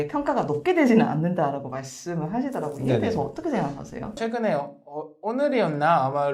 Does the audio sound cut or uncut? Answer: cut